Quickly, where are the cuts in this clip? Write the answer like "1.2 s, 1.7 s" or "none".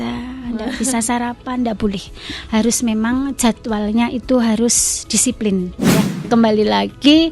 6.2 s